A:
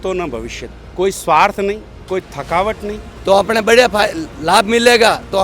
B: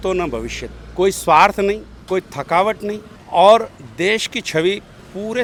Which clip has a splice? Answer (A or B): A